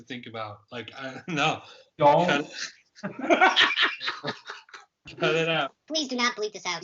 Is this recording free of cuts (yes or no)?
no